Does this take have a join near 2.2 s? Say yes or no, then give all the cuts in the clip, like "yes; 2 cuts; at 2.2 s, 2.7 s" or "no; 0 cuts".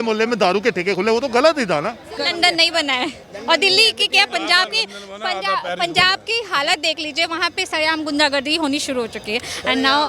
yes; 1 cut; at 2.2 s